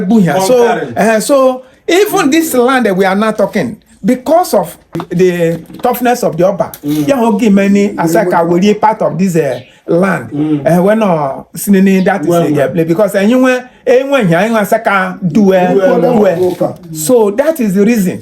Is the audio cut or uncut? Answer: cut